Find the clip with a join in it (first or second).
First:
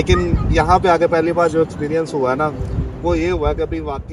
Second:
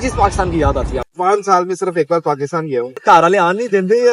second